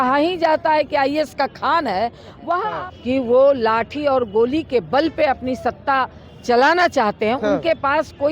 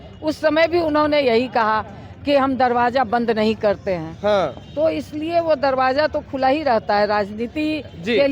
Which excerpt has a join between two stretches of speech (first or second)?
first